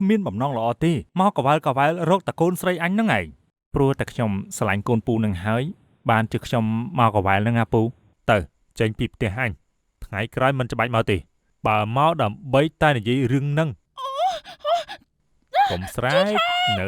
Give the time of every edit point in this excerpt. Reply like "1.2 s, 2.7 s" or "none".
1.1 s, 8.1 s, 13.8 s

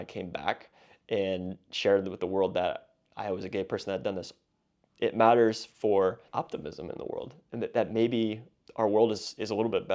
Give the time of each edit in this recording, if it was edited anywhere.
6.2 s

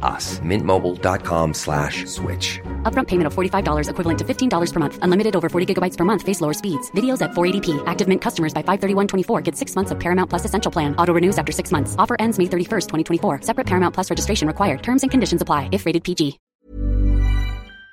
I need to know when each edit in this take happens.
16.4 s

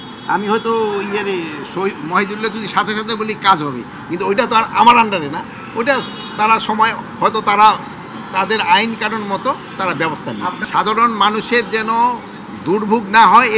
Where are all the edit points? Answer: 10.6 s

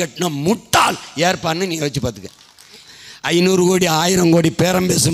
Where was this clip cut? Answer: 2.9 s

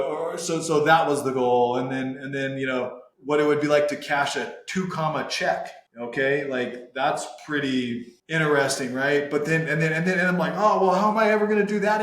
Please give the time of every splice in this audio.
3.1 s, 5.8 s, 8.1 s

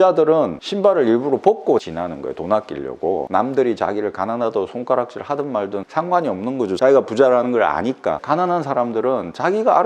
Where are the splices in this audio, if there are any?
1.8 s, 6.8 s, 8.2 s

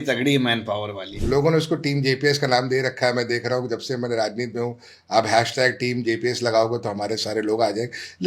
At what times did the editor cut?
1.1 s

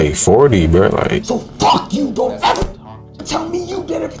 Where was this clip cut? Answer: 1.2 s

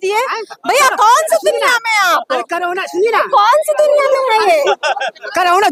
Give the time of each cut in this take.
none

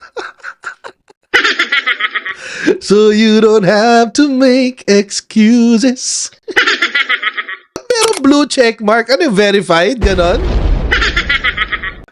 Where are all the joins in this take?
7.7 s

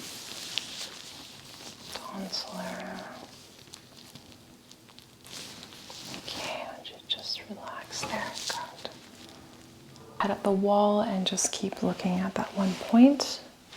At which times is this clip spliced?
10.2 s

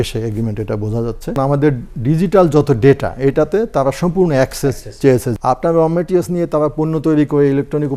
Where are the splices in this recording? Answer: 1.4 s, 5.3 s

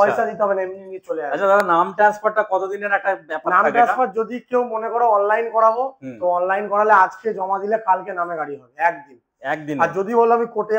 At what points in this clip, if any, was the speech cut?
none

